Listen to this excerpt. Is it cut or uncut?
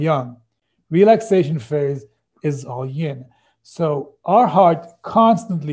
uncut